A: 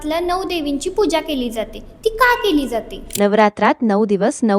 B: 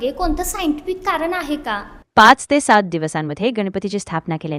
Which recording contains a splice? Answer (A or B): A